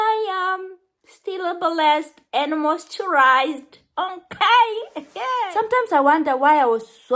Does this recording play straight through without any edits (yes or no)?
no